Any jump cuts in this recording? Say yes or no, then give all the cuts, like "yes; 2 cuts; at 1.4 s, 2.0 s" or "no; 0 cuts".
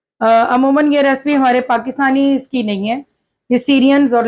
no; 0 cuts